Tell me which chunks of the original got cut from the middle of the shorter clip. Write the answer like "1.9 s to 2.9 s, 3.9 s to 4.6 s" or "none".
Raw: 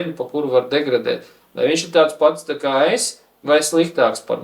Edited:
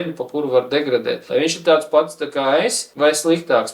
1.2 s to 1.5 s, 3.1 s to 3.3 s